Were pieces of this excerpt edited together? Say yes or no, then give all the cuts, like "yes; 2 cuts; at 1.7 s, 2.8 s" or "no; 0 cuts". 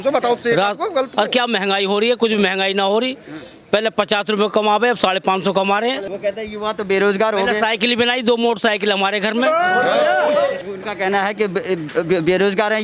yes; 2 cuts; at 6.1 s, 10.6 s